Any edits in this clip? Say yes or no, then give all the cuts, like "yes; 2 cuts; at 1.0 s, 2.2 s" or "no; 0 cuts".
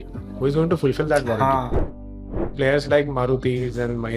yes; 1 cut; at 2.1 s